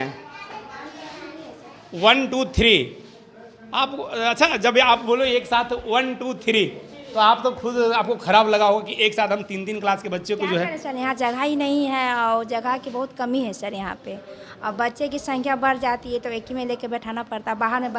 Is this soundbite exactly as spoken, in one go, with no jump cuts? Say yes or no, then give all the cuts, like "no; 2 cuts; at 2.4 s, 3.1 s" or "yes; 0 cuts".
yes; 0 cuts